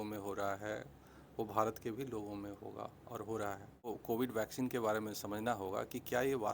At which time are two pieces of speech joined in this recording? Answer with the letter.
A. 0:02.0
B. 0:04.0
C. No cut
B